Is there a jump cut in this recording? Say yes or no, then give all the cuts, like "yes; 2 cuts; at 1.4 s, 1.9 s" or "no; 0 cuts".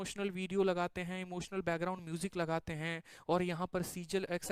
no; 0 cuts